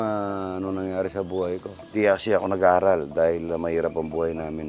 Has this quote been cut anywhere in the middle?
yes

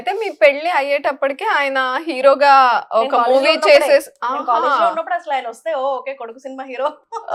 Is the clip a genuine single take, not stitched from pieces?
yes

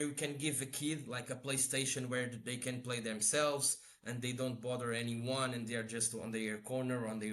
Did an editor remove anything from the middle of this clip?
no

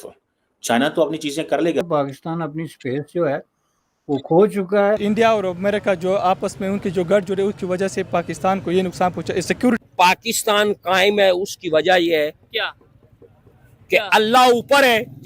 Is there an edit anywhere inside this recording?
yes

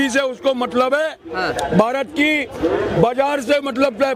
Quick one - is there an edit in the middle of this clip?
no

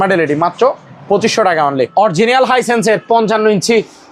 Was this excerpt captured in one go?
no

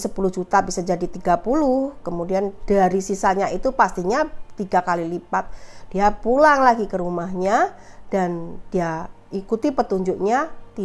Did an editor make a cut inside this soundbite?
no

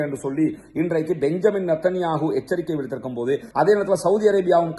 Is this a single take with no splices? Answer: no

